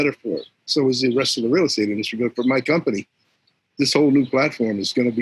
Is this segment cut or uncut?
uncut